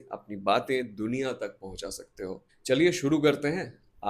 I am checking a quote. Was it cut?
yes; 1 cut; at 2.5 s

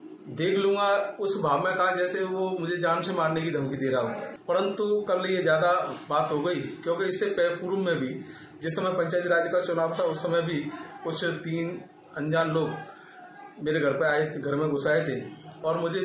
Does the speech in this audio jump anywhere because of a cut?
yes; 1 cut; at 4.3 s

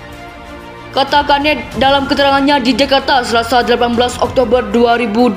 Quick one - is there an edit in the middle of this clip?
yes; 1 cut; at 0.9 s

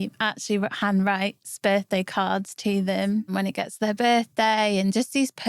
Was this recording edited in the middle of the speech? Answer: yes; 1 cut; at 3.3 s

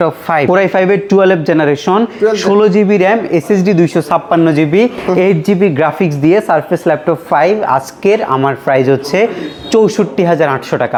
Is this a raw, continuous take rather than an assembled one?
yes; 0 cuts

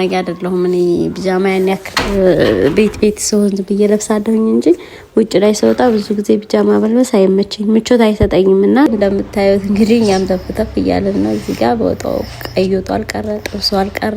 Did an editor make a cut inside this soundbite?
yes; 1 cut; at 8.9 s

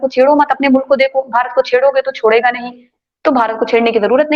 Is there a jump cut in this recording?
no; 0 cuts

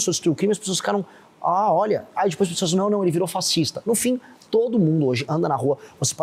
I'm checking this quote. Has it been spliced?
no; 0 cuts

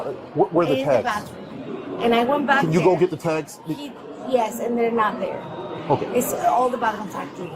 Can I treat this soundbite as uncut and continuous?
yes; 0 cuts

